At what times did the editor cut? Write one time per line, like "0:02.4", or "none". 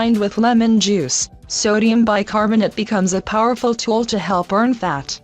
0:02.4